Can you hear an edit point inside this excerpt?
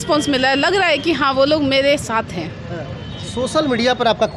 no; 0 cuts

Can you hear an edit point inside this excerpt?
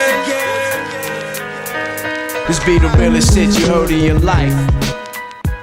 no; 0 cuts

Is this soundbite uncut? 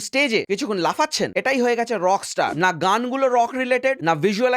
no; 1 cut; at 2.6 s

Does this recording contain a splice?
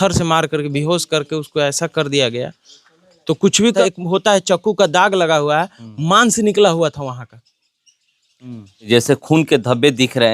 yes; 2 cuts; at 3.8 s, 8.8 s

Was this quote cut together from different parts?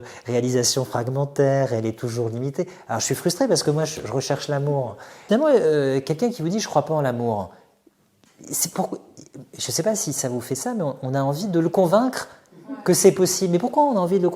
yes; 1 cut; at 5.2 s

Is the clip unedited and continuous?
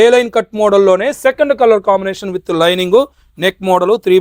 yes; 0 cuts

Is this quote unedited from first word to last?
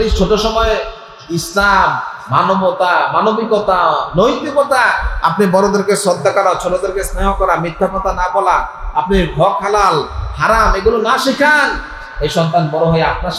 yes; 0 cuts

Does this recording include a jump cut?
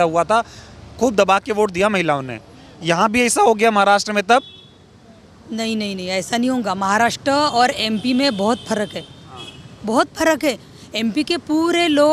no; 0 cuts

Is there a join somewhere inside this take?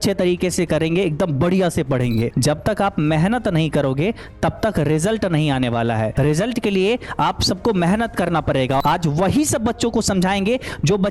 yes; 3 cuts; at 2.3 s, 6.1 s, 8.8 s

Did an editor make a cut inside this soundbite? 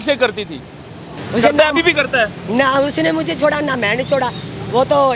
yes; 1 cut; at 1.1 s

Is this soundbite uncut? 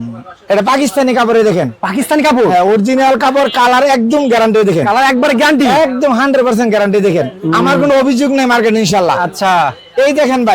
yes; 0 cuts

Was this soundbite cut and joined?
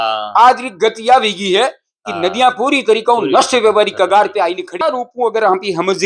yes; 1 cut; at 4.8 s

